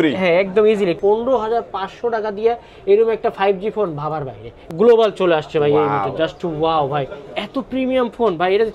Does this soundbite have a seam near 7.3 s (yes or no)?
no